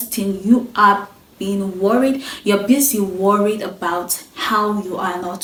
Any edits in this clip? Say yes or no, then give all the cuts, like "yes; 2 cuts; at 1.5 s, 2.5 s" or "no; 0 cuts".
no; 0 cuts